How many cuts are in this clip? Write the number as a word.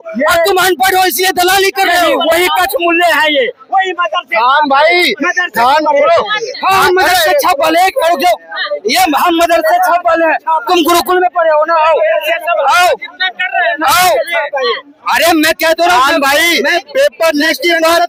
zero